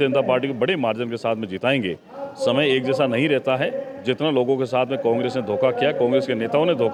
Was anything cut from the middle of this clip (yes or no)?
no